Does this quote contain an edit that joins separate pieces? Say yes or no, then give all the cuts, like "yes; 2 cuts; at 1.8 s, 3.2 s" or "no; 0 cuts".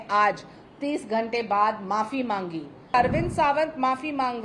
yes; 1 cut; at 2.9 s